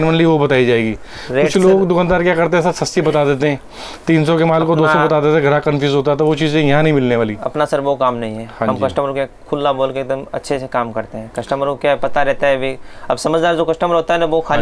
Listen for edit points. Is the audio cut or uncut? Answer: uncut